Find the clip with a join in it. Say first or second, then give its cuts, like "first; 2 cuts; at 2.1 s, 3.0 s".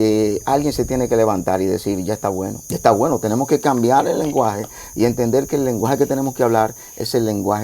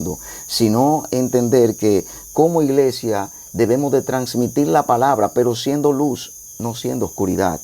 first; 1 cut; at 2.6 s